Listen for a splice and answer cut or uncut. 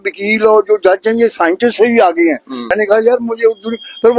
cut